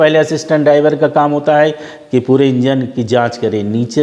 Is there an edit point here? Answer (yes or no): no